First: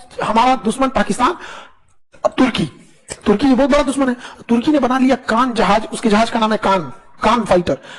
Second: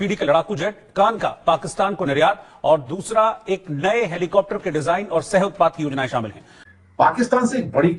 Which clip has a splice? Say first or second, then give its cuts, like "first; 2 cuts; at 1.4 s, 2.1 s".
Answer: second; 1 cut; at 6.6 s